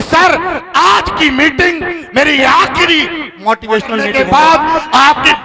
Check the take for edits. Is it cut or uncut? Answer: cut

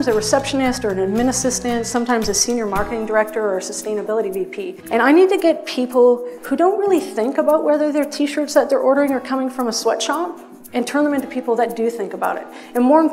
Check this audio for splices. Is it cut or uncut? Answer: cut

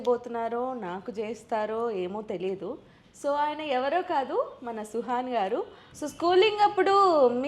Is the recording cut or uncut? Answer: cut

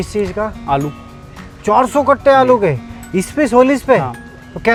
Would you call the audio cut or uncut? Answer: uncut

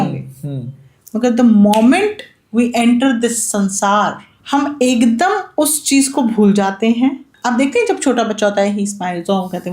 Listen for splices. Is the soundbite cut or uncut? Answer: cut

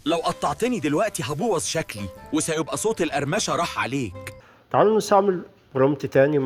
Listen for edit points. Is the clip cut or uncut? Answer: uncut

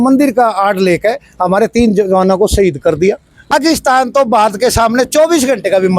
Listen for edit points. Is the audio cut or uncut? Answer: cut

